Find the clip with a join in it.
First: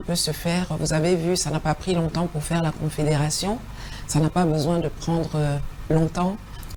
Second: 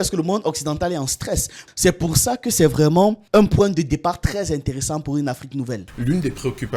second; 2 cuts; at 1.6 s, 5.8 s

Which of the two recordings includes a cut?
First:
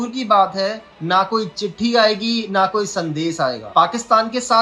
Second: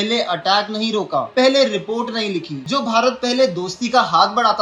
second; 1 cut; at 2.5 s

